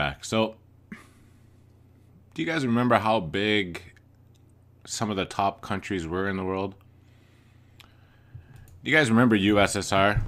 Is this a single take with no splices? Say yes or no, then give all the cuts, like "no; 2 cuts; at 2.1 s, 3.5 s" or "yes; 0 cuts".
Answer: yes; 0 cuts